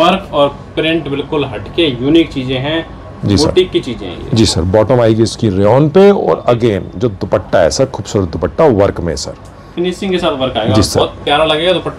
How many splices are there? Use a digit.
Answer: 0